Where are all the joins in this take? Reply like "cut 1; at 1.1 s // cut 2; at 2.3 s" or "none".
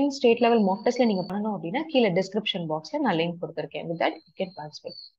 cut 1; at 1.3 s